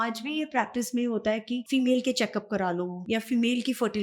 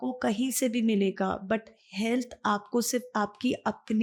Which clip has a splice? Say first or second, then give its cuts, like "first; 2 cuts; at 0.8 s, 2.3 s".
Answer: first; 2 cuts; at 1.6 s, 3.0 s